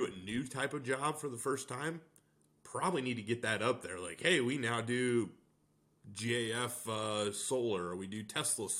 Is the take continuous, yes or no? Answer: yes